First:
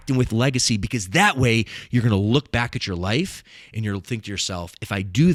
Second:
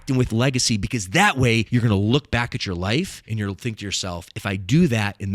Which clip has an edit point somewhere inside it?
second; 2 cuts; at 1.7 s, 3.2 s

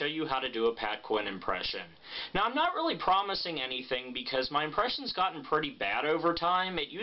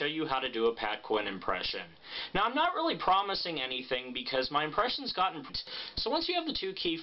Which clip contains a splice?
first; 1 cut; at 5.4 s

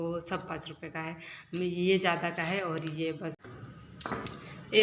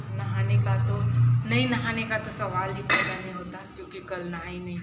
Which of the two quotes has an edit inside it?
first; 1 cut; at 3.4 s

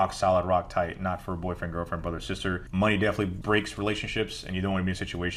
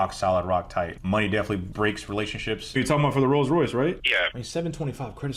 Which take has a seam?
second; 3 cuts; at 1.0 s, 2.6 s, 4.4 s

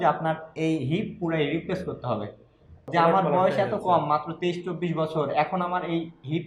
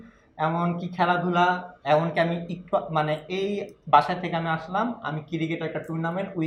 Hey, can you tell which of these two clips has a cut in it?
first; 1 cut; at 2.9 s

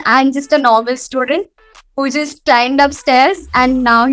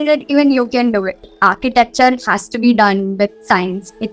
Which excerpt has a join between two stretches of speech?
second; 1 cut; at 1.2 s

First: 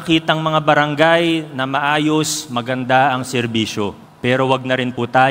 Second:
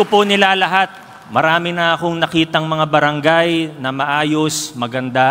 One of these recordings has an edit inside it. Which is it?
first; 1 cut; at 4.0 s

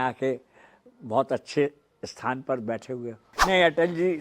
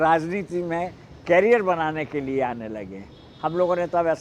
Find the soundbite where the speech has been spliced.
first; 1 cut; at 3.2 s

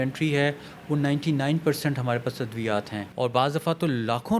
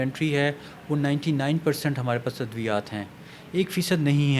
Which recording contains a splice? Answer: first; 1 cut; at 3.0 s

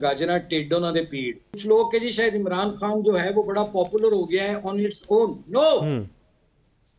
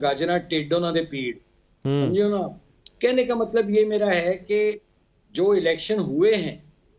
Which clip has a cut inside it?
first; 1 cut; at 1.5 s

